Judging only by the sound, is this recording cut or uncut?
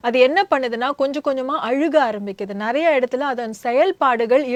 uncut